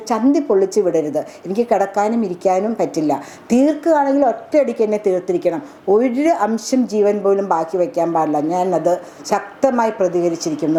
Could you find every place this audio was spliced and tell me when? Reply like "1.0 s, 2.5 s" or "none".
none